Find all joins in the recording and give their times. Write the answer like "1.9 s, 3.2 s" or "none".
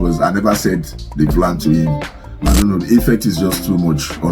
2.4 s